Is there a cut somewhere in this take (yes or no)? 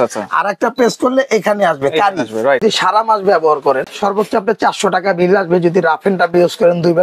yes